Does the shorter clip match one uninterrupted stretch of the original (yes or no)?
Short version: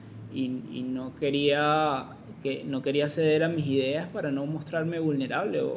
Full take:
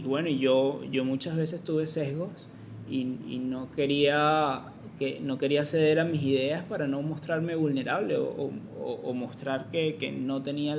yes